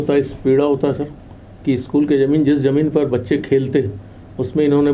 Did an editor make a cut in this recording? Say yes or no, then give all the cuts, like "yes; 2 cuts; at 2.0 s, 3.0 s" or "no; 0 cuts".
no; 0 cuts